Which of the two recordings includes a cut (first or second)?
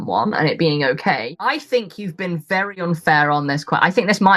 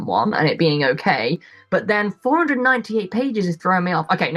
first